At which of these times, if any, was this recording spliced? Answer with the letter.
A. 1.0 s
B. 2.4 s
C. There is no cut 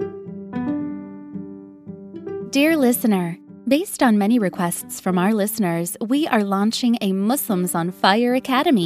B